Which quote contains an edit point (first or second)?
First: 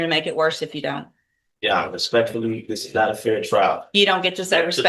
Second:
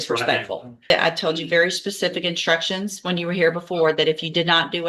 second